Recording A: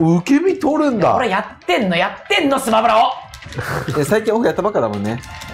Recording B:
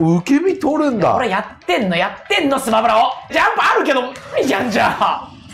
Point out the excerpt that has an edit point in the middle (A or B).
B